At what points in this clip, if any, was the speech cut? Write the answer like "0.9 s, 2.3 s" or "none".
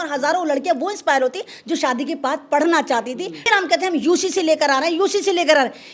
3.5 s